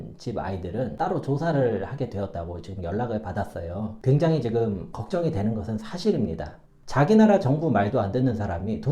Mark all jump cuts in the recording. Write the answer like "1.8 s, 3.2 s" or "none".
4.0 s, 6.8 s